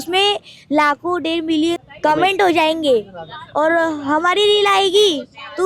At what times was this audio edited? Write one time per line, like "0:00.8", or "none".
0:01.8